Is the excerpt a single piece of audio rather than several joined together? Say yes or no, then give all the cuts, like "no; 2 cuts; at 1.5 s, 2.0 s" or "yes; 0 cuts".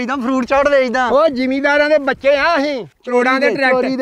no; 1 cut; at 2.9 s